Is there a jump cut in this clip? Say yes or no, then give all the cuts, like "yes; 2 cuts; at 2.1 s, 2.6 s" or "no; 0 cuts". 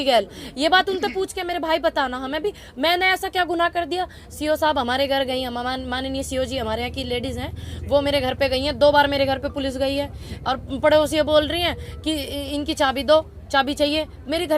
no; 0 cuts